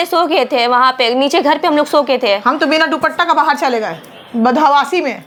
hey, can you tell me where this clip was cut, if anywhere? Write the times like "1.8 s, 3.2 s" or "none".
none